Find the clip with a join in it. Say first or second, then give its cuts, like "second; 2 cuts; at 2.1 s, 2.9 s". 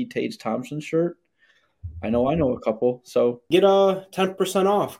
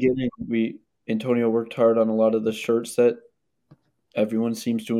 first; 1 cut; at 3.4 s